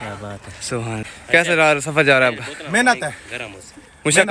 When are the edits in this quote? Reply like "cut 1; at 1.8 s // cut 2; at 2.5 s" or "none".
cut 1; at 1.0 s